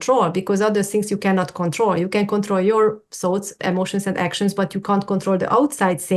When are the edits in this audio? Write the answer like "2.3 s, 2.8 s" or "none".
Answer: none